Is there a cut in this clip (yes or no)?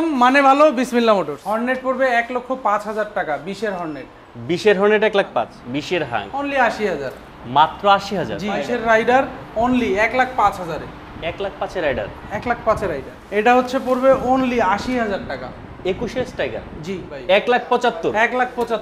yes